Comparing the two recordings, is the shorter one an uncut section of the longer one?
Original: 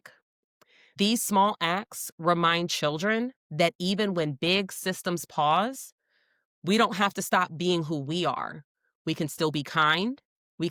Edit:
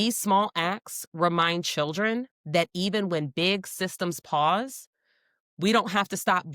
yes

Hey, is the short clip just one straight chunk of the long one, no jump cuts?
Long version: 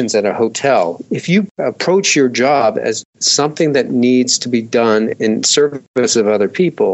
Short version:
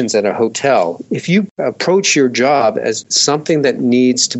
no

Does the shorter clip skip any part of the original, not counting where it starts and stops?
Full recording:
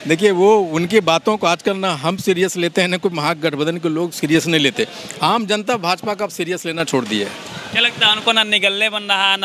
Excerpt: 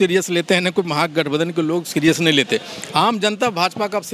no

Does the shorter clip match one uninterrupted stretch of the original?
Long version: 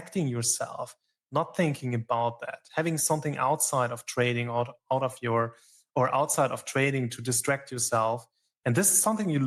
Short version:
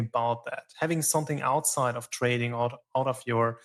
yes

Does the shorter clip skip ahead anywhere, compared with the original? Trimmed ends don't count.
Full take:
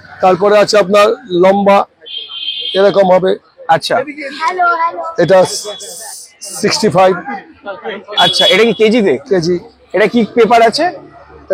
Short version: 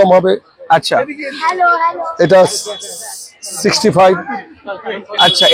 no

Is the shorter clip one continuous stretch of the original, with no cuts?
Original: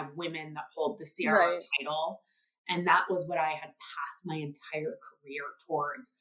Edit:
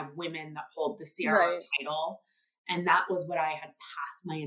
yes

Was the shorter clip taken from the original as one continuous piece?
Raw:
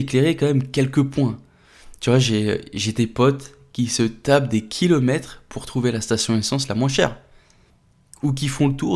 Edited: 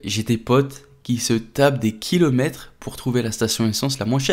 yes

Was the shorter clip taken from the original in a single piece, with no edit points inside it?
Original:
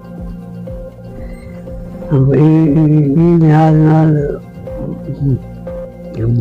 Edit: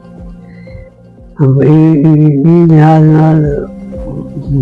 no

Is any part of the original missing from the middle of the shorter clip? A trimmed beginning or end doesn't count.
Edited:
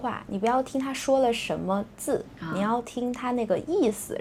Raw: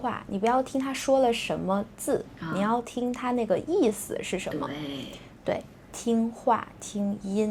no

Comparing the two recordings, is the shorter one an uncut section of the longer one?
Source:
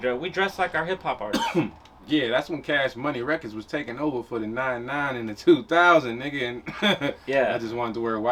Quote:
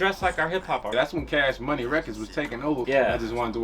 no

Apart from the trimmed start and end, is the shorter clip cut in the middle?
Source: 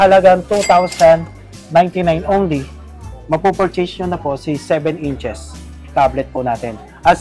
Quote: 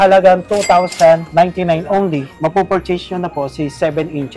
yes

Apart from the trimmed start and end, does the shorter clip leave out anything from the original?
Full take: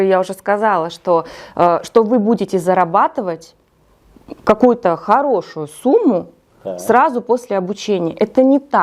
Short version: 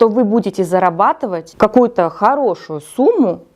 yes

